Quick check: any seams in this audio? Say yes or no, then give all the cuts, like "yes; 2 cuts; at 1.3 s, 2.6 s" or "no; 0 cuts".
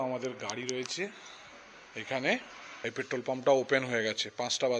yes; 1 cut; at 2.6 s